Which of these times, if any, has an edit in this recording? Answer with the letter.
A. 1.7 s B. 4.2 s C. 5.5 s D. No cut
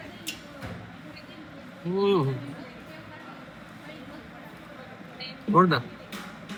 D